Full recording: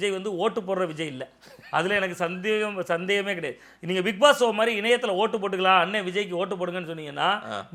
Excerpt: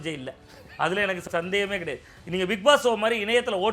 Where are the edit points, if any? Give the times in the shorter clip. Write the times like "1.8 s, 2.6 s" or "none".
1.3 s